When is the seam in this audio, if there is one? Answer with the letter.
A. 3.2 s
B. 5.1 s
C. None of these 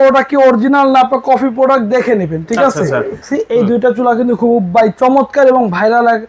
A